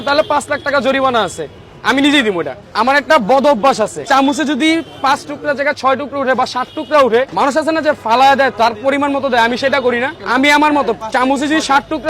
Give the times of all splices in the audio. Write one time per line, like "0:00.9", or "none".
0:02.6
0:04.1
0:07.3
0:10.2